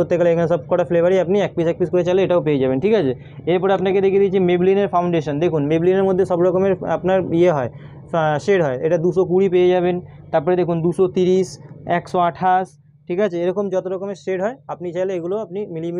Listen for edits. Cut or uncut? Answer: uncut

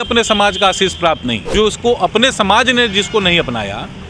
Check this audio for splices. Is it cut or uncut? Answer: cut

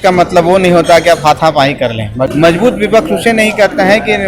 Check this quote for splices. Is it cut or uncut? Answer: cut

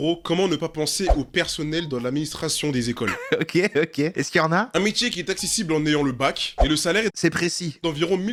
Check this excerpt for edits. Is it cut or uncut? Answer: uncut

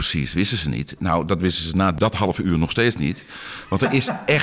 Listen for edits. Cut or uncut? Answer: cut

